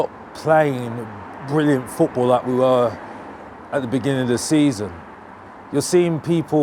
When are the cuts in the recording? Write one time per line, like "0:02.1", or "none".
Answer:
none